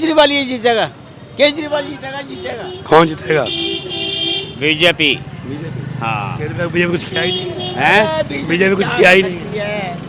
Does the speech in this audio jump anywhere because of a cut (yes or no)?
no